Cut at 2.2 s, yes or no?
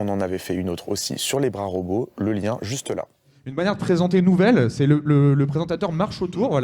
no